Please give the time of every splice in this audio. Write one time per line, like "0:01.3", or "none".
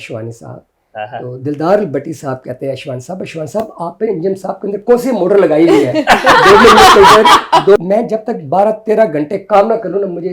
0:07.8